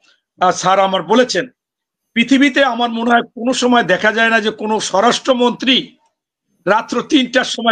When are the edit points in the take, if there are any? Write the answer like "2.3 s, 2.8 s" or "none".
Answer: none

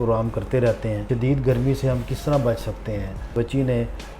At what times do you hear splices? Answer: 1.0 s, 3.3 s

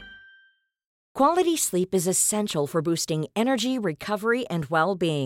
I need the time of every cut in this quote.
1.0 s

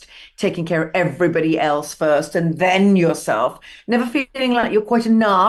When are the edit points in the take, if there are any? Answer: none

